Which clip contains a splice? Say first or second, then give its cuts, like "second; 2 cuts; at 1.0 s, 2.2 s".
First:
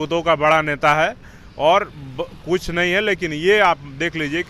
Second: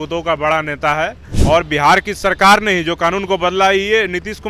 second; 1 cut; at 1.3 s